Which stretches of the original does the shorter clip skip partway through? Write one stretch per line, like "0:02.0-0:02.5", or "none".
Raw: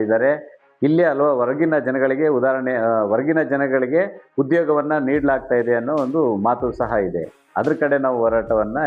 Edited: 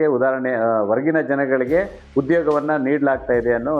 none